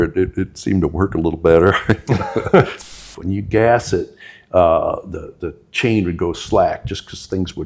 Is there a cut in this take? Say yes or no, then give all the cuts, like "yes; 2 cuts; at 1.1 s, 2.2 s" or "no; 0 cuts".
yes; 1 cut; at 2.9 s